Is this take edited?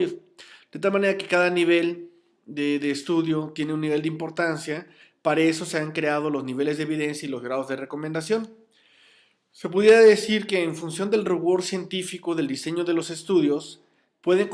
no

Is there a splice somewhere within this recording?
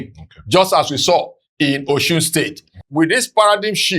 yes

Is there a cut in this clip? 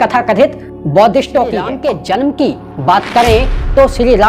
yes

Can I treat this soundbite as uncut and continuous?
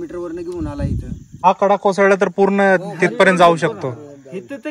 no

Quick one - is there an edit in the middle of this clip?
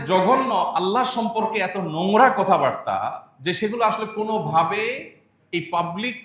no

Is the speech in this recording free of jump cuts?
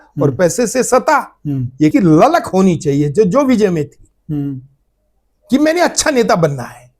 no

